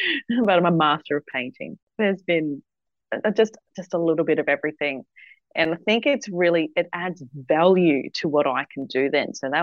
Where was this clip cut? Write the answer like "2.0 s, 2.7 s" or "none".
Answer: 1.9 s